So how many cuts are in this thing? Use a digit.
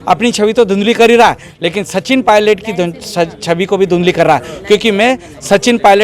0